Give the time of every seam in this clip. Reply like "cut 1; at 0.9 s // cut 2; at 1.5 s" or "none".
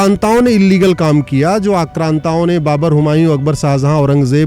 none